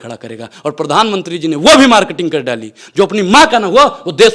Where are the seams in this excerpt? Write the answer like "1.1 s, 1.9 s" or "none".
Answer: none